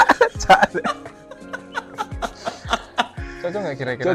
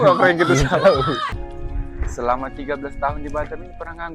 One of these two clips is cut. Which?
second; 1 cut; at 1.3 s

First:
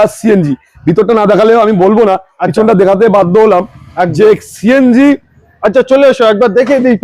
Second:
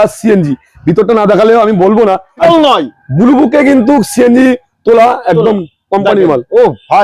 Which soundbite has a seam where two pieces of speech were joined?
second; 1 cut; at 2.4 s

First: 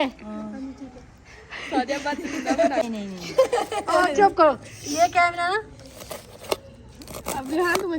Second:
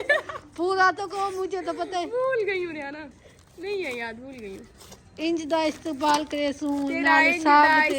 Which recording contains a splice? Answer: first; 1 cut; at 2.9 s

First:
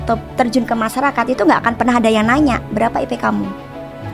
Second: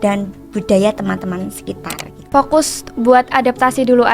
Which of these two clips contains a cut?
second; 1 cut; at 2.3 s

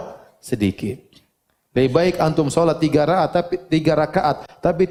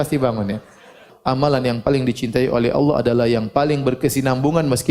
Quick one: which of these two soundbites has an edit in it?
second; 1 cut; at 1.1 s

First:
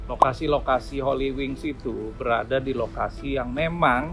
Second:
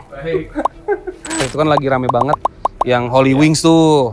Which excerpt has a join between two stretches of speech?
second; 1 cut; at 1.5 s

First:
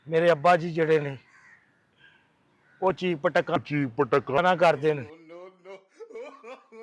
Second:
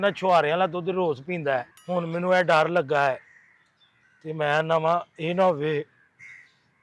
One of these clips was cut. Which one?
second; 1 cut; at 1.7 s

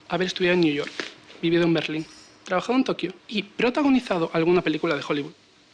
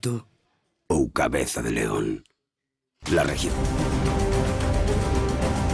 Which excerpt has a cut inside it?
second; 1 cut; at 3.4 s

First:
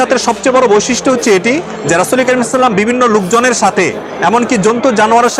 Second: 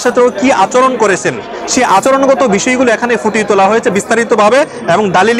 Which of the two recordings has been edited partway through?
second; 1 cut; at 2.0 s

